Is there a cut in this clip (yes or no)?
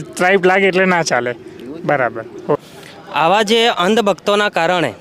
yes